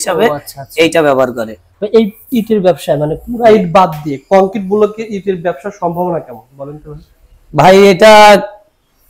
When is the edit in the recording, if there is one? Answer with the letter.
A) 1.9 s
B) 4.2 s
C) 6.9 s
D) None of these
D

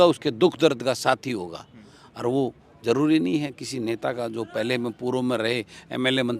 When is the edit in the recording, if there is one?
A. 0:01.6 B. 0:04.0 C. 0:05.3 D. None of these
D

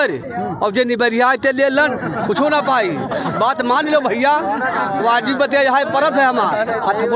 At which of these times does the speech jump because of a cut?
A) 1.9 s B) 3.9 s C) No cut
C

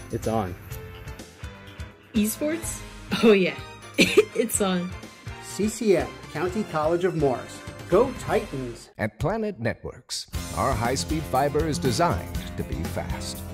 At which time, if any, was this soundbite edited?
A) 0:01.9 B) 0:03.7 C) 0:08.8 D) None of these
C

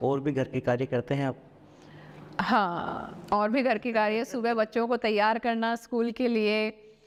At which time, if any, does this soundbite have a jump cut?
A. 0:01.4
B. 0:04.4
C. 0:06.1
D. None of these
D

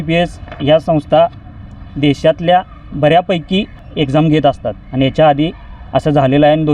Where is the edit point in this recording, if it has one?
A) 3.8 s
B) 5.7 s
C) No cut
A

